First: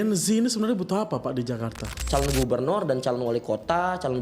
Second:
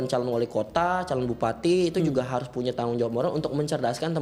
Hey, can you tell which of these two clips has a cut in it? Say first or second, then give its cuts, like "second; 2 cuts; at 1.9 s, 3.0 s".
first; 1 cut; at 2.0 s